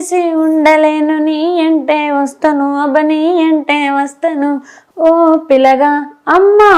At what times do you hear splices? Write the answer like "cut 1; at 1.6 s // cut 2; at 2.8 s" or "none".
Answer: cut 1; at 4.7 s